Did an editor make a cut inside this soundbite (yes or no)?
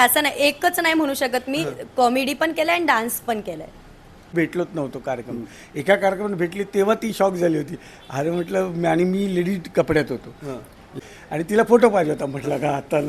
yes